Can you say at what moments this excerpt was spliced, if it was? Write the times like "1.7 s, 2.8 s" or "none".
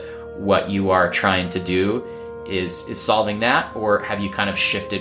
none

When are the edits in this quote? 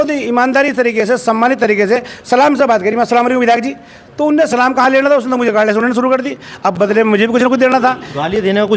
none

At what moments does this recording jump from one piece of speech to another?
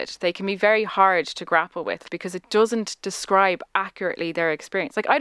2.0 s

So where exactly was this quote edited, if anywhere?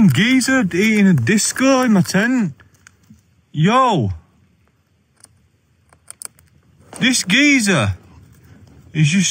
none

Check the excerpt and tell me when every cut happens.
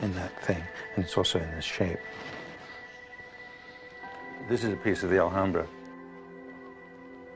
5.3 s

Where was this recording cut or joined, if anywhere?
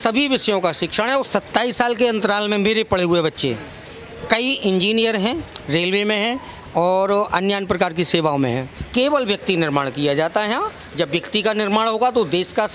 1.3 s, 8.8 s

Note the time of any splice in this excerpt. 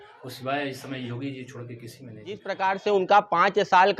2.5 s

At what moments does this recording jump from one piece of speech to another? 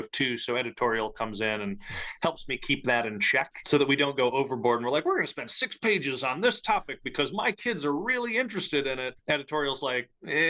3.6 s, 9.1 s

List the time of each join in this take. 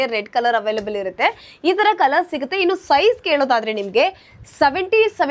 none

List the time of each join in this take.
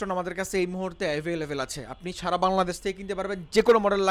none

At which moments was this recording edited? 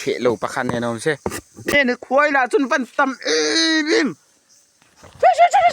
1.7 s

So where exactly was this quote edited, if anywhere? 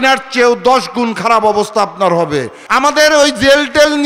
2.6 s

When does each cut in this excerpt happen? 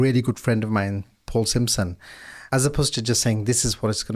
2.4 s

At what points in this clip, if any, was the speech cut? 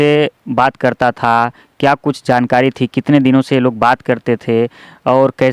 none

